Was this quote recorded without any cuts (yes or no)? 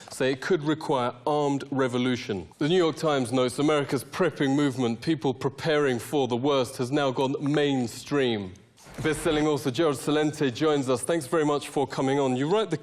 yes